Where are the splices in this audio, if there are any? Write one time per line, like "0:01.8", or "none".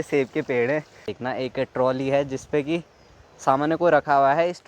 0:01.1